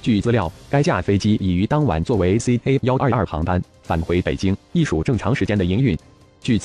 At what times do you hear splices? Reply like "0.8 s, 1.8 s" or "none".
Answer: 4.2 s